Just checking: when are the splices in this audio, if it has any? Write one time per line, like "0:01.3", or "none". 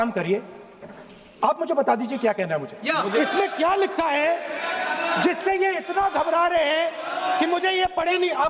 0:03.1